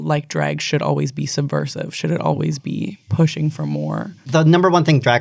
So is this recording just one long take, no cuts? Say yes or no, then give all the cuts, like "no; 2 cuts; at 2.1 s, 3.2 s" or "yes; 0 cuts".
yes; 0 cuts